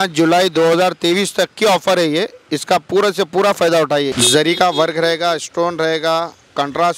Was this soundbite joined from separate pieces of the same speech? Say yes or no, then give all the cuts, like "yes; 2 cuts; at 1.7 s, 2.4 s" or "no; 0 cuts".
yes; 1 cut; at 4.1 s